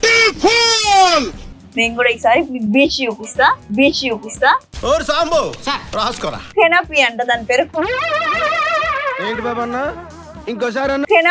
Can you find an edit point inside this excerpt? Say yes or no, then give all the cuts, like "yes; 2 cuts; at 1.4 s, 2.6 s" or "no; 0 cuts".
yes; 2 cuts; at 1.5 s, 6.4 s